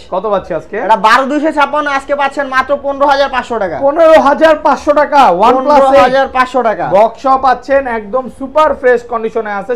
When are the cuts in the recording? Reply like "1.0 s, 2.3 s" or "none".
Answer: none

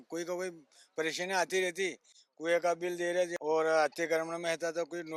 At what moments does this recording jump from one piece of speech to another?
3.4 s

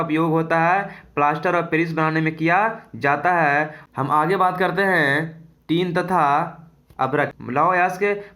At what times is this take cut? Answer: 3.8 s, 7.4 s

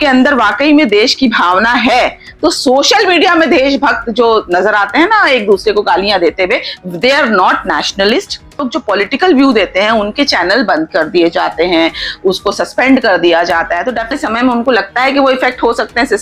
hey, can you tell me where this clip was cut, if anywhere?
8.7 s, 14.1 s

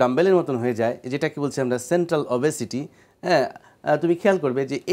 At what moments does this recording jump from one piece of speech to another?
none

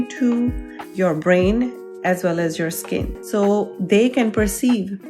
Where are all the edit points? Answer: 3.2 s

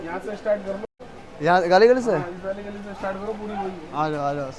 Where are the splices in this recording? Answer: none

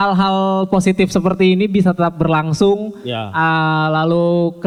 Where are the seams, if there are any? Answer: none

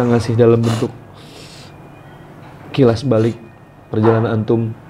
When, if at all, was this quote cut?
none

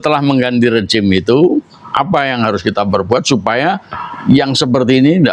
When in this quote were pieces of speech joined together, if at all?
none

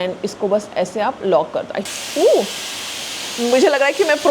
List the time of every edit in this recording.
1.9 s

